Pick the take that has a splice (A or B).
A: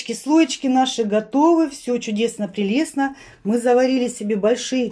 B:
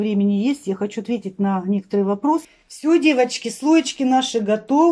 B